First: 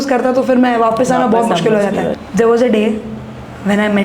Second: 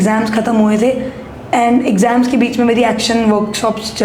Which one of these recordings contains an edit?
first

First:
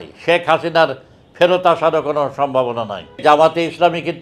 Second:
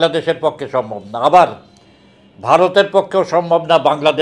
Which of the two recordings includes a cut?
first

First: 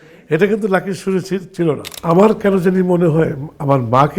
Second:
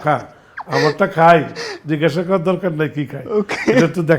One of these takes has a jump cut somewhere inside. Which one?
first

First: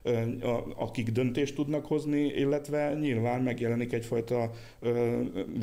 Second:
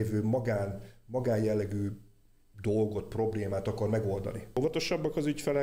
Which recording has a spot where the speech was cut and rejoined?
second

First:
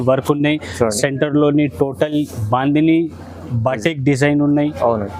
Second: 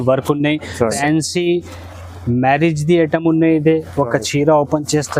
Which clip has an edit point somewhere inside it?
second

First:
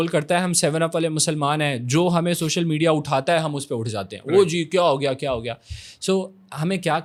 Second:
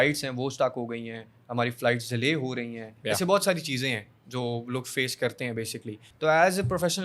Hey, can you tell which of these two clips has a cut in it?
second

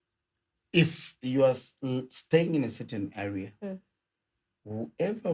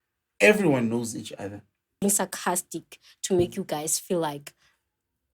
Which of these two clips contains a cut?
second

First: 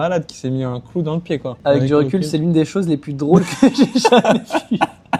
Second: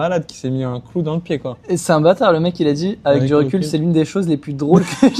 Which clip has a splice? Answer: first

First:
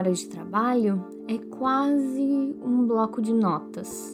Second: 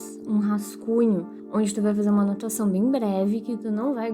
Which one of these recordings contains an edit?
second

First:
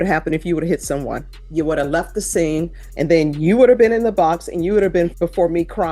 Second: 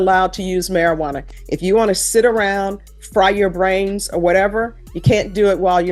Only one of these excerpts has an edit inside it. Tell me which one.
first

